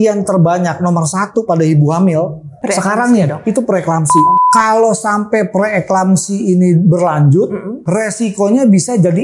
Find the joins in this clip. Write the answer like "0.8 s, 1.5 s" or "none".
2.5 s, 4.4 s, 7.8 s